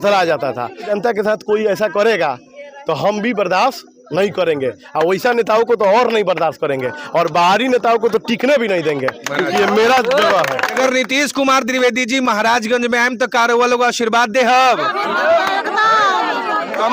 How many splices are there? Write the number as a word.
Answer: two